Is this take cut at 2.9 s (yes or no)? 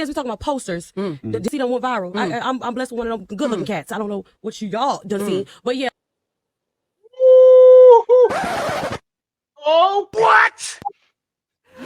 no